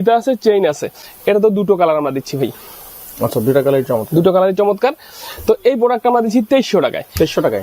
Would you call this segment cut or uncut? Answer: uncut